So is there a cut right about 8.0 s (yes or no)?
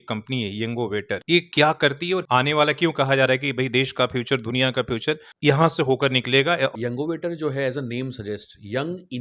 no